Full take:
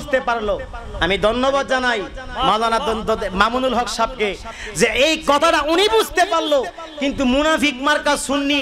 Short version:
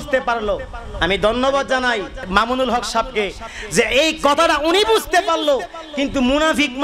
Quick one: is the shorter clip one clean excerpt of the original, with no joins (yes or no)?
no